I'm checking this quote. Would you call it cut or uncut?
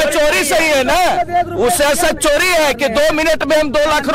uncut